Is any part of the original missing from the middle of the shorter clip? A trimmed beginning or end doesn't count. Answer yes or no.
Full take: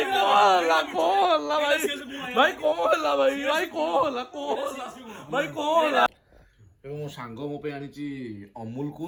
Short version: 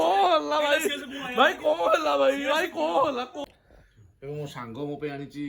yes